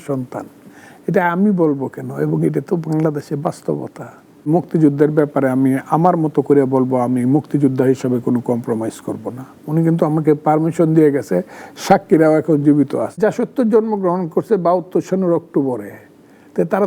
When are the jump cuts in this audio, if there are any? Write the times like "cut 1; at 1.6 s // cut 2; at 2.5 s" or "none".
cut 1; at 4.5 s // cut 2; at 13.2 s